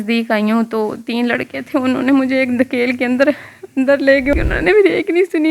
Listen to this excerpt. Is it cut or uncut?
cut